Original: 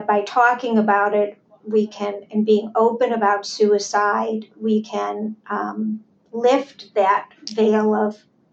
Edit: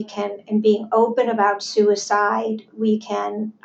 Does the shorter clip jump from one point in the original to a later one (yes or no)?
no